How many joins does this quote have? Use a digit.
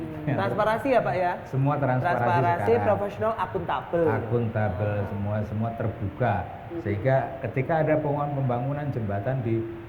0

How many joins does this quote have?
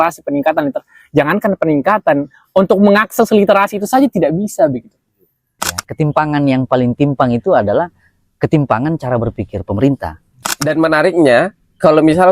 2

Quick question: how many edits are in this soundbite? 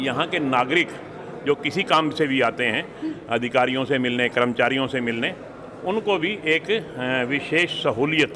0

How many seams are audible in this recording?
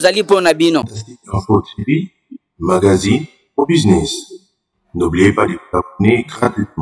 1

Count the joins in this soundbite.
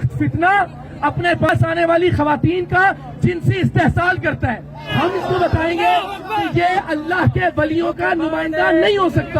2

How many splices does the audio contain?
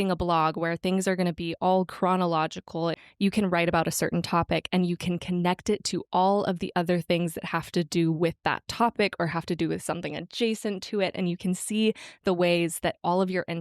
1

